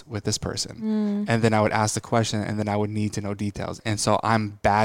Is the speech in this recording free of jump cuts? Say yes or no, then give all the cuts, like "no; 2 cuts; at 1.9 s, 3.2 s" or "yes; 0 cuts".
no; 1 cut; at 3.8 s